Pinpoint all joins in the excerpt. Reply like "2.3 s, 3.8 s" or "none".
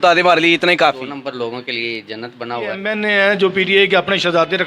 1.1 s, 2.9 s